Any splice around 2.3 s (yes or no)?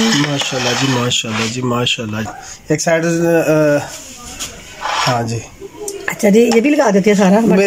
yes